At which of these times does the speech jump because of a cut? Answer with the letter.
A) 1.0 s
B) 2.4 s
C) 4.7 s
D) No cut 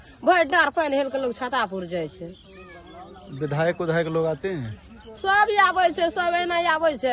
D